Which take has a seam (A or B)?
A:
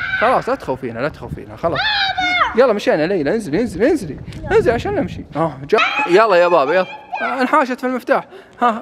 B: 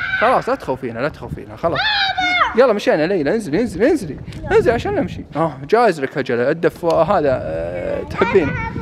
A